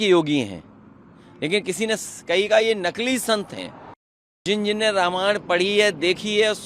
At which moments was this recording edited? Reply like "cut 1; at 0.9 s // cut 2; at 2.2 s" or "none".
cut 1; at 4.4 s

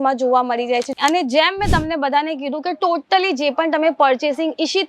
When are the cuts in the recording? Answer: cut 1; at 0.9 s

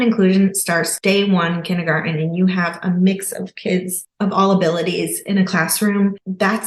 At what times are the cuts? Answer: cut 1; at 0.9 s

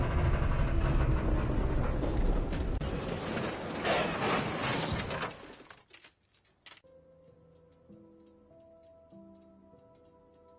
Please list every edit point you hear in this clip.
none

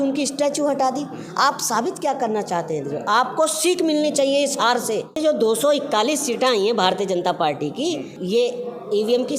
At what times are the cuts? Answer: cut 1; at 5.2 s // cut 2; at 8.1 s

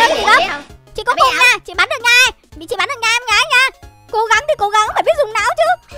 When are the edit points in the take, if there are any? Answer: cut 1; at 3.9 s

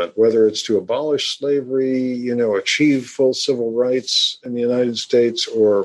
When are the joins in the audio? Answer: cut 1; at 4.3 s

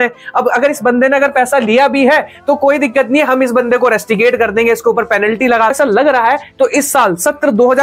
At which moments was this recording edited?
cut 1; at 5.7 s

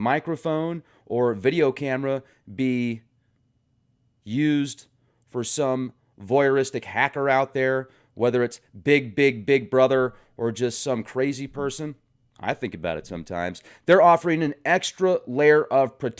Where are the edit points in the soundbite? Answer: cut 1; at 14.5 s

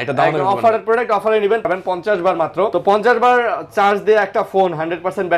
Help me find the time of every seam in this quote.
cut 1; at 1.7 s // cut 2; at 2.7 s

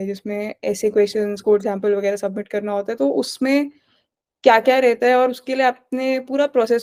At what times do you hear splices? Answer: none

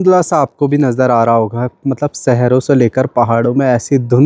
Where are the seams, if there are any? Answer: none

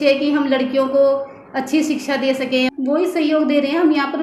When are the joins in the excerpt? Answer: cut 1; at 2.7 s

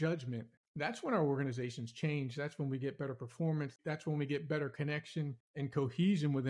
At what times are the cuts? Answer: cut 1; at 3.8 s

